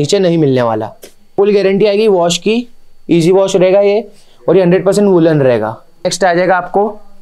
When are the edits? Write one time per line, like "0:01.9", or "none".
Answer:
0:01.3
0:06.0